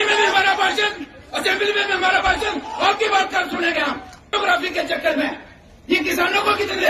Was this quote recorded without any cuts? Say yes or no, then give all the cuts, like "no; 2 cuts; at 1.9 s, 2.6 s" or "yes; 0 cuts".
no; 1 cut; at 4.3 s